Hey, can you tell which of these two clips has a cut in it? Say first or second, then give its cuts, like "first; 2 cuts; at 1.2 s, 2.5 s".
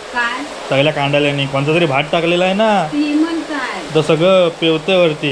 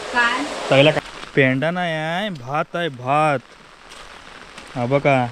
second; 1 cut; at 1.0 s